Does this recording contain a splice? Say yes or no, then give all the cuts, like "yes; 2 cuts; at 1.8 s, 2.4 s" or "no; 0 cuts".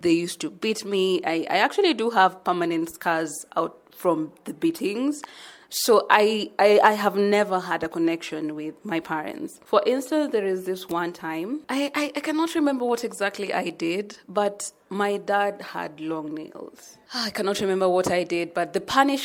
no; 0 cuts